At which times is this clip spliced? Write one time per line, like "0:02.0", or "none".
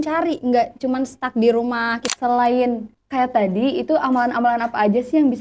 0:02.0
0:02.9

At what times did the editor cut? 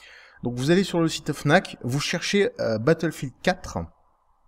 0:01.3

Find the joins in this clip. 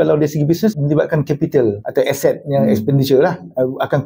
0:00.7
0:01.8

